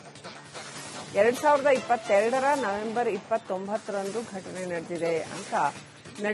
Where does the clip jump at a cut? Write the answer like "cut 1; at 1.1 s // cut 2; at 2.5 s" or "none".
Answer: cut 1; at 1.1 s